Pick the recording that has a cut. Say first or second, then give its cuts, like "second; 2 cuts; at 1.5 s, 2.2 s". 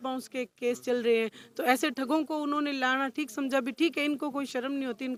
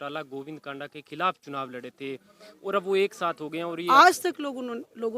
second; 1 cut; at 3.8 s